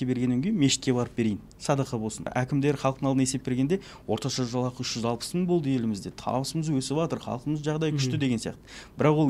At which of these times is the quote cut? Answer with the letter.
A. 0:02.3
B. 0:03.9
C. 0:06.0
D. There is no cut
A